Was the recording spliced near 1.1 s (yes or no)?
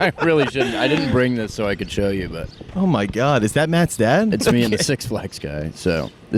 no